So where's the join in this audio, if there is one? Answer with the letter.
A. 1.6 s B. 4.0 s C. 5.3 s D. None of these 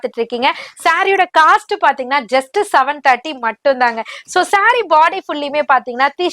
D